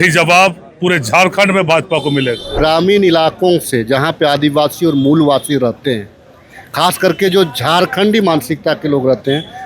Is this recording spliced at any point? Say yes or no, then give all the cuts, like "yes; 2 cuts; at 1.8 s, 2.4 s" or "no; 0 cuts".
yes; 1 cut; at 2.5 s